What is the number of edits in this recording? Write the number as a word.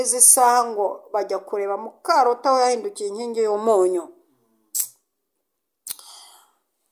zero